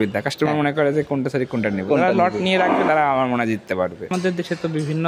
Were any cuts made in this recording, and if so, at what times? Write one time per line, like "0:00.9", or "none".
0:04.1